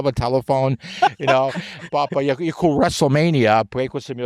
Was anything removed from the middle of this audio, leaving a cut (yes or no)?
no